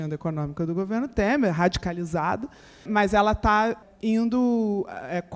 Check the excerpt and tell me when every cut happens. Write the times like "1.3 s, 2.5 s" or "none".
2.9 s, 3.8 s